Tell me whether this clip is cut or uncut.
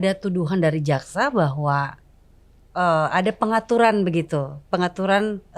uncut